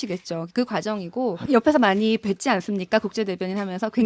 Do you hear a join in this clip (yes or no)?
yes